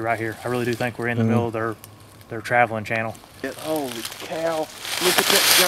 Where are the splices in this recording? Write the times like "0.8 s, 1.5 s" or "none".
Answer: 3.6 s